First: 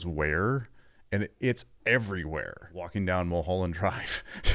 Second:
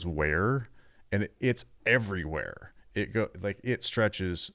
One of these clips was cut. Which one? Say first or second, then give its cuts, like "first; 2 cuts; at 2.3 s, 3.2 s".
first; 1 cut; at 2.8 s